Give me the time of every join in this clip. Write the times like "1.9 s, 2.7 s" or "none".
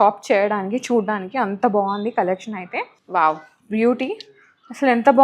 3.0 s